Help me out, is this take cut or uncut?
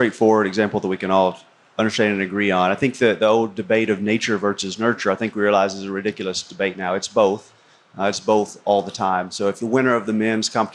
cut